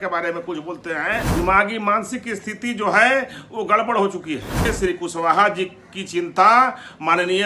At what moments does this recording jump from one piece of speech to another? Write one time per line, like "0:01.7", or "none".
0:01.3
0:04.7